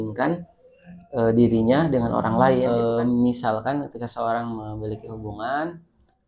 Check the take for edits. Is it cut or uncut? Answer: cut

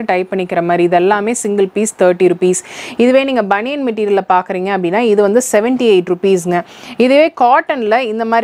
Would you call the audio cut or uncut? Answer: uncut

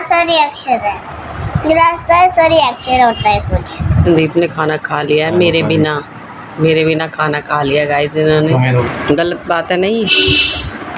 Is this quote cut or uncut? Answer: cut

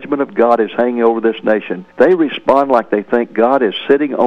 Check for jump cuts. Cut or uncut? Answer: cut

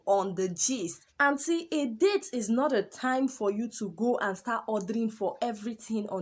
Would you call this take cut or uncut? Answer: cut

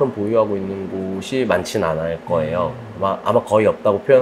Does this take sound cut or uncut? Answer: uncut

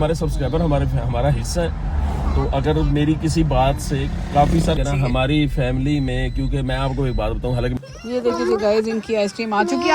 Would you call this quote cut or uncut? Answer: cut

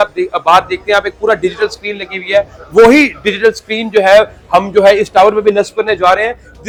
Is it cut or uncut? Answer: uncut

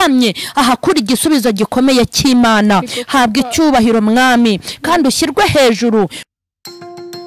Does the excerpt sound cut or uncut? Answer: cut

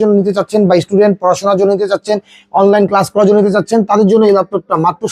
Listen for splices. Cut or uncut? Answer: uncut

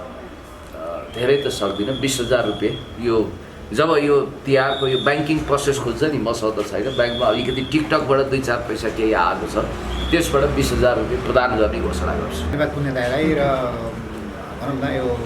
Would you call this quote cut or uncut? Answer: cut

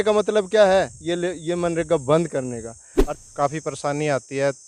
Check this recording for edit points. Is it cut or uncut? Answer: cut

